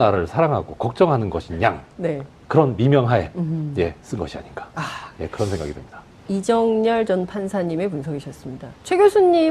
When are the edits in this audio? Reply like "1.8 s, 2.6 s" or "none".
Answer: none